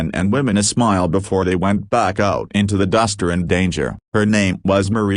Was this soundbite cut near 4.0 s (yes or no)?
yes